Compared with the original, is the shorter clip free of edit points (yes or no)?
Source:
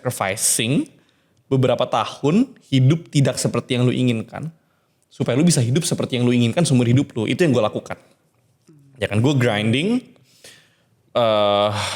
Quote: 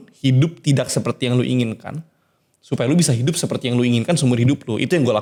yes